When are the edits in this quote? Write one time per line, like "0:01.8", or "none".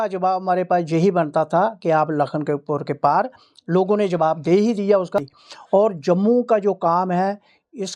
0:05.2